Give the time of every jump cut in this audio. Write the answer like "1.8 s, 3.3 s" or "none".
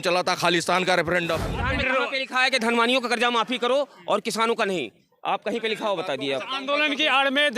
1.5 s